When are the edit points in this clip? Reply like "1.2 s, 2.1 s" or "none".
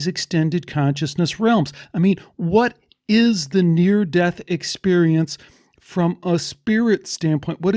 none